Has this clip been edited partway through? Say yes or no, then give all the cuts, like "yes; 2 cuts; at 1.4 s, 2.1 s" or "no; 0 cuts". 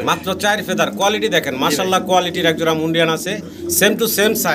no; 0 cuts